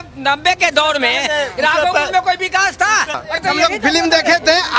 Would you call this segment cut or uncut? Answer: cut